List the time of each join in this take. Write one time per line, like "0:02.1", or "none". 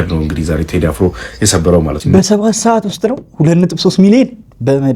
0:02.0